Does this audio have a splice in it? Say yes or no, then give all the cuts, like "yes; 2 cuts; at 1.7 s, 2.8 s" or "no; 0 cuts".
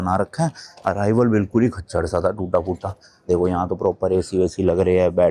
no; 0 cuts